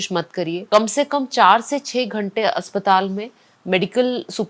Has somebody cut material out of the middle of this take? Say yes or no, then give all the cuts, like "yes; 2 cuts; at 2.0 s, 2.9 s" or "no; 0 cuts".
no; 0 cuts